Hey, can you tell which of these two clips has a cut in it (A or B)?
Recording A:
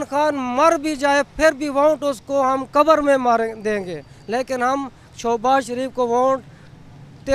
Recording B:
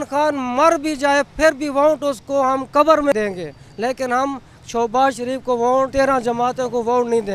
B